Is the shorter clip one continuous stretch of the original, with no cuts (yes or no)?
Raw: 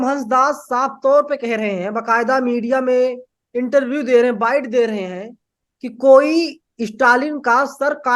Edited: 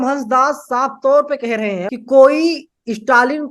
no